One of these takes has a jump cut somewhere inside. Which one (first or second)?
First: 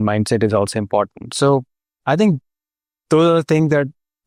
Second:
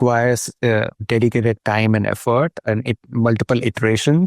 second